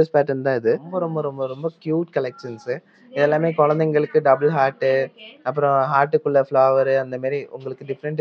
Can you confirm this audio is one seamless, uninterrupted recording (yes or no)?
no